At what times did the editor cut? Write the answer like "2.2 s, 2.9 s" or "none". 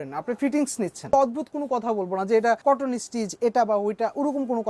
1.1 s, 2.6 s